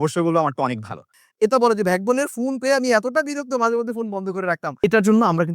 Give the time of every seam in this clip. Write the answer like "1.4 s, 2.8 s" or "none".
1.2 s, 4.8 s